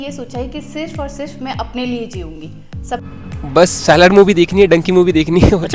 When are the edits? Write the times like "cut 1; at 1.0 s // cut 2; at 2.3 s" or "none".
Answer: cut 1; at 3.0 s